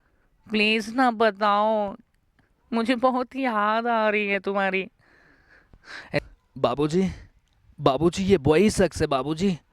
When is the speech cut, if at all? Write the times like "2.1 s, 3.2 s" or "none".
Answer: 6.2 s